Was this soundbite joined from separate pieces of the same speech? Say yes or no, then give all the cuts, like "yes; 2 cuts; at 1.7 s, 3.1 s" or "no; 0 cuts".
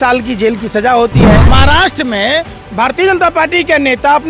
yes; 1 cut; at 1.4 s